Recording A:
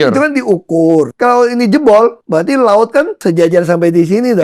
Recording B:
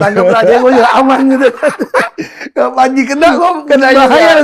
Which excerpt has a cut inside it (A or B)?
A